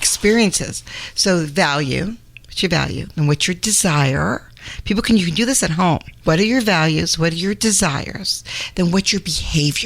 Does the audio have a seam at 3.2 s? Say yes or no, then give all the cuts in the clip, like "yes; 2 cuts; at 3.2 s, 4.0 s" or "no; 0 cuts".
no; 1 cut; at 6.1 s